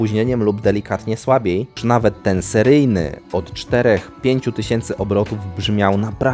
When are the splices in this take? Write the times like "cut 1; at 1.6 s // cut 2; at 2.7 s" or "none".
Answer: cut 1; at 1.8 s